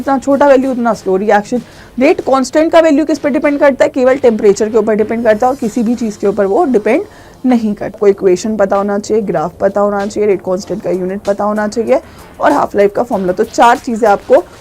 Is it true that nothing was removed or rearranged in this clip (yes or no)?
no